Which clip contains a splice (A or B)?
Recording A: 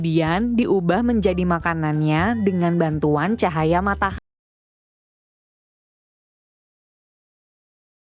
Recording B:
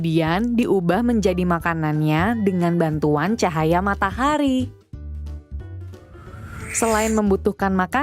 B